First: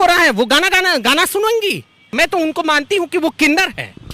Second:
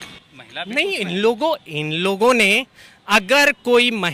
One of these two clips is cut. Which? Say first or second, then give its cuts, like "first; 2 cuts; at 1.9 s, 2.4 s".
first; 1 cut; at 2.1 s